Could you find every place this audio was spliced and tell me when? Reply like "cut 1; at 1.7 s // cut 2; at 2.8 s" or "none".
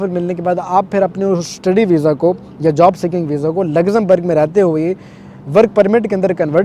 none

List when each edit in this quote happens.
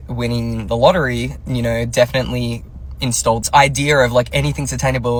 none

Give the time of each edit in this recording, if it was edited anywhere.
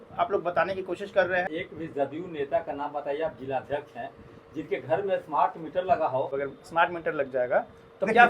cut 1; at 1.5 s // cut 2; at 6.3 s

